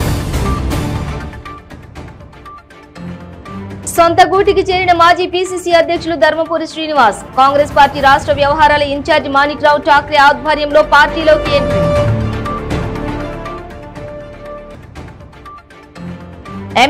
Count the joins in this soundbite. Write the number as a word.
two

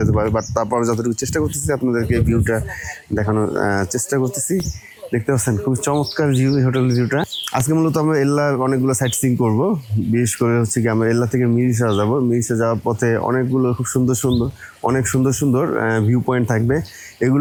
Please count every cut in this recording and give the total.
zero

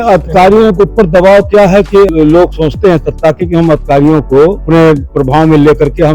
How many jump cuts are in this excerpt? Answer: two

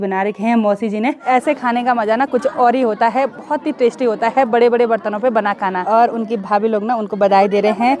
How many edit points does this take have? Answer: two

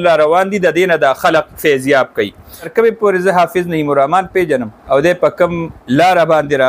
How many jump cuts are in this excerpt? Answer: three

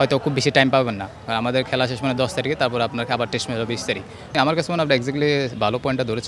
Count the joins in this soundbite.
one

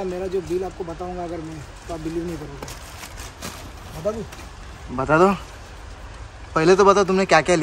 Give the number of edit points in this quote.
zero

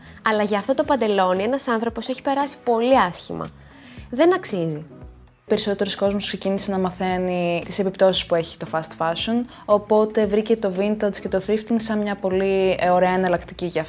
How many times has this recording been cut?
two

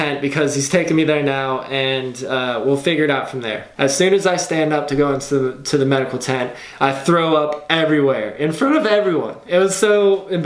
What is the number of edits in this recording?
one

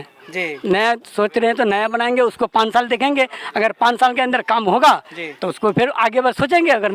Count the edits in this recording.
zero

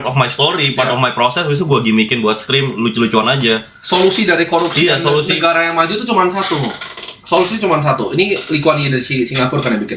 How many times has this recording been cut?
zero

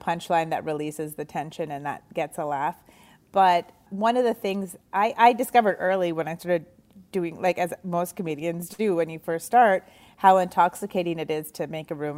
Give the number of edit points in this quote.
one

